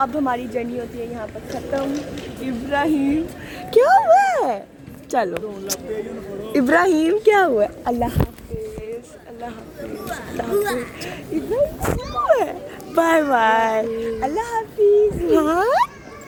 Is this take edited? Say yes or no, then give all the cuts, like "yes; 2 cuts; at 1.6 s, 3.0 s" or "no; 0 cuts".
no; 0 cuts